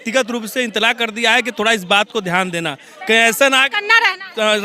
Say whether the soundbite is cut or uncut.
uncut